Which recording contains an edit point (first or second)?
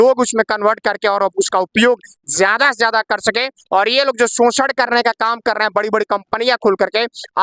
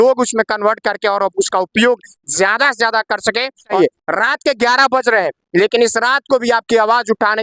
second